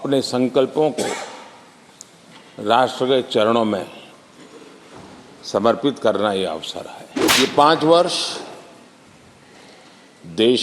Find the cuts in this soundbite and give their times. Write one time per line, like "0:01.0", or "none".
0:07.3